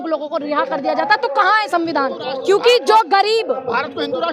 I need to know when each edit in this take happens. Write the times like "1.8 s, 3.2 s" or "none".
2.2 s

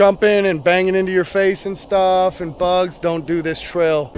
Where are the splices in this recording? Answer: none

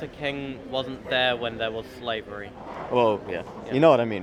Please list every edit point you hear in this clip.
none

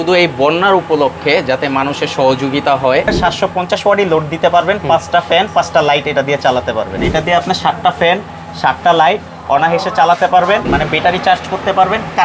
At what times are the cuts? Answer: 3.1 s, 7.0 s, 10.6 s

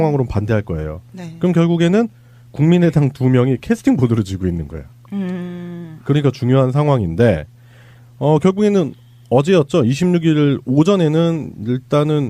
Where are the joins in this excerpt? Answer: 2.0 s

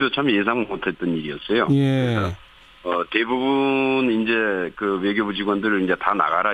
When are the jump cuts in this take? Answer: 1.3 s

